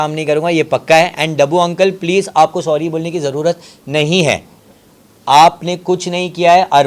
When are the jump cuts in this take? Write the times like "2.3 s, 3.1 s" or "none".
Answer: none